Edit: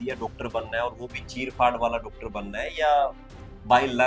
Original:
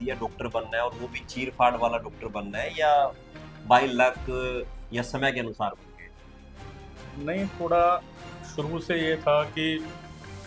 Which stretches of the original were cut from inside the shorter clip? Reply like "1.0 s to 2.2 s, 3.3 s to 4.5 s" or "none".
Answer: none